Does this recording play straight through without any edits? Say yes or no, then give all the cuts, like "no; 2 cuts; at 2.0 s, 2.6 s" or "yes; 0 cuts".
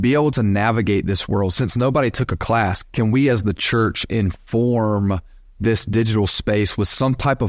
no; 1 cut; at 2.8 s